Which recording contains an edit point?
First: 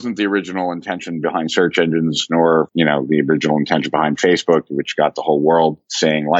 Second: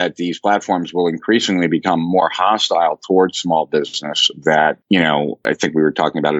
second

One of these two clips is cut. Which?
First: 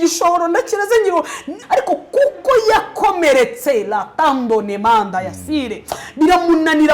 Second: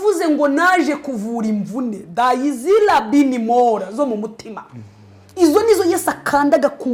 first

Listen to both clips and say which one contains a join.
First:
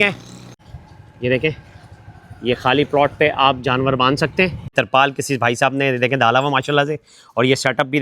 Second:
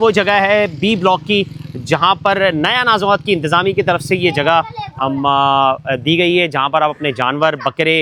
first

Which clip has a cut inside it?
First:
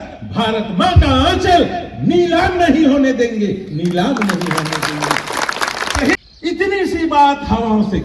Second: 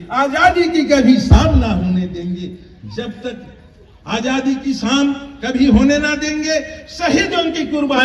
first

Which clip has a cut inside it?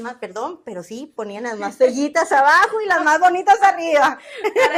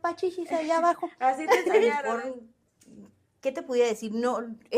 second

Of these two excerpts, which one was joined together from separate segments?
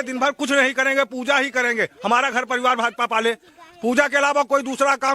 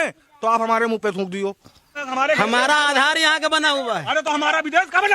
second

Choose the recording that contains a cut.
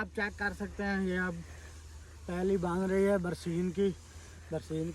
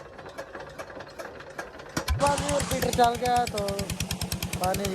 second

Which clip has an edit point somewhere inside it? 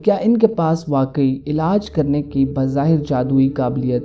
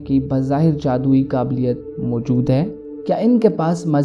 second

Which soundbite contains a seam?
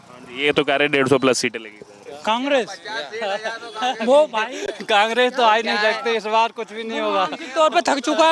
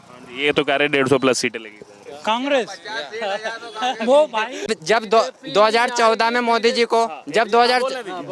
second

